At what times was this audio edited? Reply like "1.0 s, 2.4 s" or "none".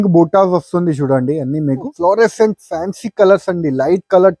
1.9 s